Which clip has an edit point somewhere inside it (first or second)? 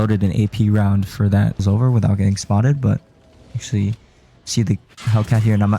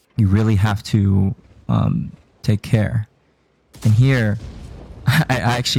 first